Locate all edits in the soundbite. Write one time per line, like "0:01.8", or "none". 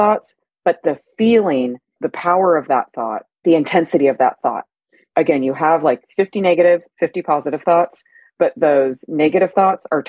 0:02.0
0:03.2
0:05.1

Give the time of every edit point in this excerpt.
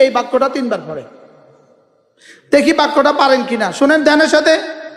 none

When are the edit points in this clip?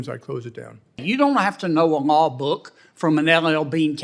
0:01.0

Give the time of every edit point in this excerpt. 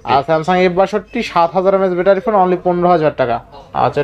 none

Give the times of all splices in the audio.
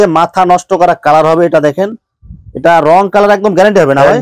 none

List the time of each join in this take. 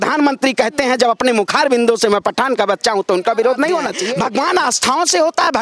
0:04.0

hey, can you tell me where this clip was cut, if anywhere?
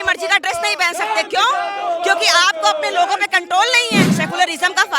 0:04.0

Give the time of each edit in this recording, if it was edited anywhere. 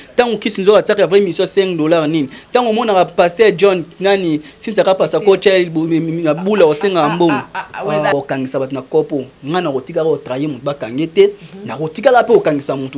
0:08.1

